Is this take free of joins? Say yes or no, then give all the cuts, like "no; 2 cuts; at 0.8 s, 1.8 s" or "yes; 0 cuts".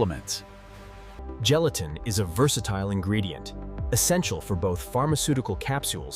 no; 1 cut; at 1.2 s